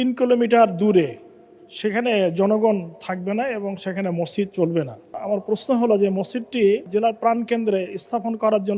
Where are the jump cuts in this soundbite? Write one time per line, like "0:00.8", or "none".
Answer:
0:05.2
0:06.9